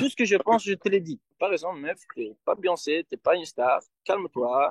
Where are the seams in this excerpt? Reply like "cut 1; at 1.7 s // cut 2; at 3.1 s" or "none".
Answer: cut 1; at 1.2 s